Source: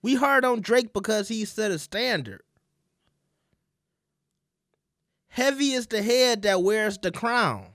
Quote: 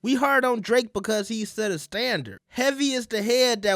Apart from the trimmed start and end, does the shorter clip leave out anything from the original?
yes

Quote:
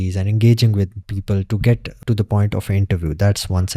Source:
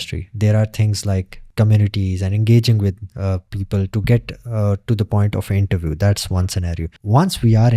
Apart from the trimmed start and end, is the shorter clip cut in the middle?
yes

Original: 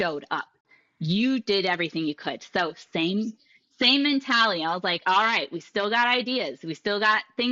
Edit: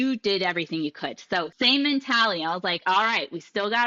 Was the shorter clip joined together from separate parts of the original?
yes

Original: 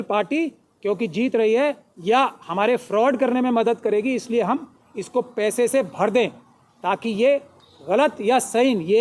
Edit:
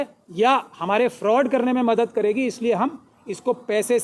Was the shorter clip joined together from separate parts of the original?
no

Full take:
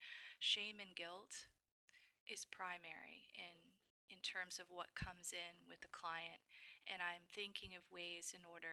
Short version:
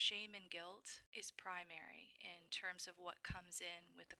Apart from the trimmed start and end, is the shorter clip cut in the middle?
yes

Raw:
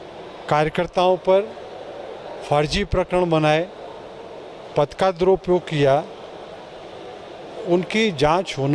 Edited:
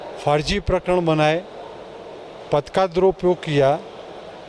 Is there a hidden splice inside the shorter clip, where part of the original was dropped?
no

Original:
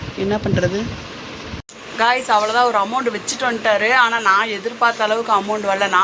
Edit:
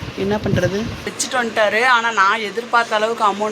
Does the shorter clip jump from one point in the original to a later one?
yes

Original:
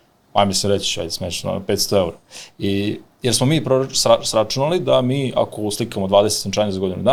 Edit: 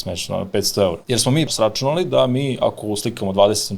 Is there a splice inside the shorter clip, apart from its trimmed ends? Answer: yes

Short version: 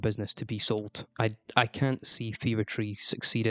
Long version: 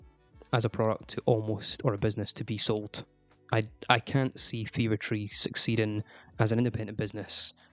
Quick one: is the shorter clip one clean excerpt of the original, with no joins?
no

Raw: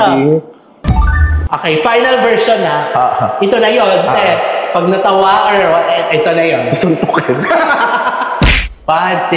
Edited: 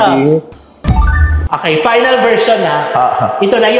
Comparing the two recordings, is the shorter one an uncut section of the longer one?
yes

